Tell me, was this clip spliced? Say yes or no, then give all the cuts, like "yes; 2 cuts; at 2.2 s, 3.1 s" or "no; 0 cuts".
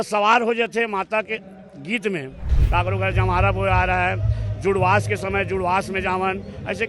yes; 1 cut; at 2.6 s